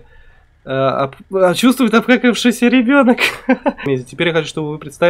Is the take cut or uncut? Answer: cut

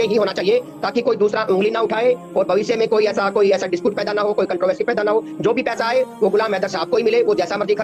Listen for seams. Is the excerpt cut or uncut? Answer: uncut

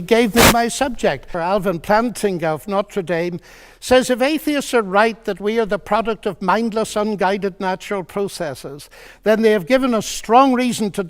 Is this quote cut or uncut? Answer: cut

